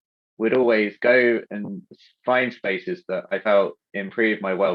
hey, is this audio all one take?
yes; 0 cuts

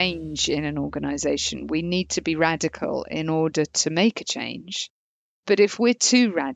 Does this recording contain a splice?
no; 0 cuts

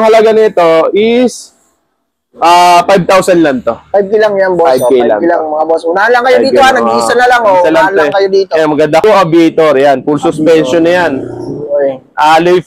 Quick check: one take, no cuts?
no; 1 cut; at 9.0 s

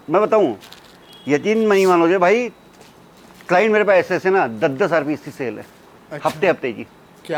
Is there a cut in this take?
no; 0 cuts

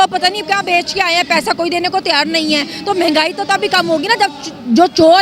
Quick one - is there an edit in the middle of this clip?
no; 0 cuts

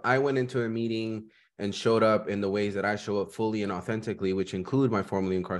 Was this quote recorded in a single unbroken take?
yes; 0 cuts

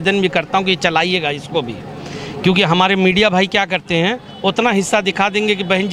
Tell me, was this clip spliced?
no; 0 cuts

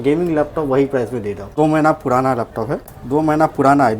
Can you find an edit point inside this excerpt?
yes; 2 cuts; at 1.5 s, 2.9 s

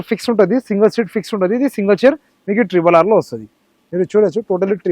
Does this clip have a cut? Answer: no; 0 cuts

